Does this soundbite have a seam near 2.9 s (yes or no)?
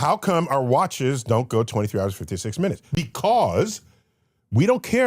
yes